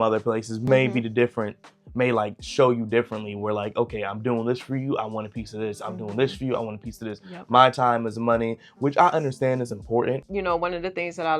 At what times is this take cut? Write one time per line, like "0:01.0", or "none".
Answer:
0:10.3